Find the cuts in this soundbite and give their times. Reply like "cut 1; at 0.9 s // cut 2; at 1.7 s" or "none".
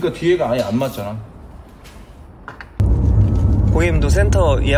cut 1; at 2.8 s